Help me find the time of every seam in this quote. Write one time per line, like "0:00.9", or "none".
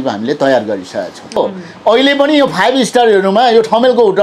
0:01.4